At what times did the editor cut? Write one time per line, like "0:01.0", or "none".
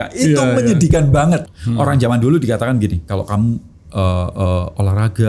0:01.4